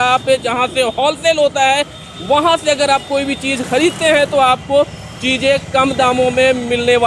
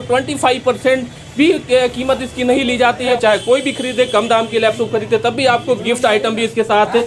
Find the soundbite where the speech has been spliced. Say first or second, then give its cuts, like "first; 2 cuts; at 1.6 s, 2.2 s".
second; 1 cut; at 3.1 s